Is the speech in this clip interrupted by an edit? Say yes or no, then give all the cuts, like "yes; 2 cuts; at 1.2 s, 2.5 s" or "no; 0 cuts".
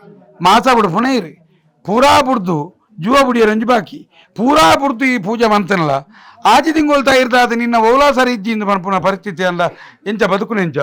no; 0 cuts